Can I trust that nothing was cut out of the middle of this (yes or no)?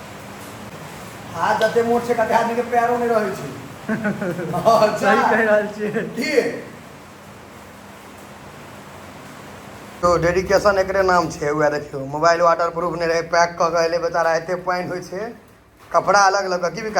no